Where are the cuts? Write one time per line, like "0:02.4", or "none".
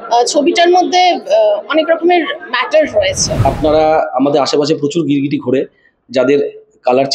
0:03.4